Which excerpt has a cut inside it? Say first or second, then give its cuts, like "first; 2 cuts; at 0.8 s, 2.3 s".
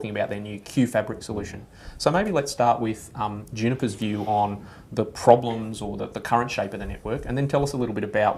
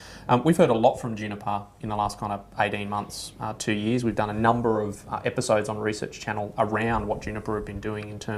first; 1 cut; at 3.2 s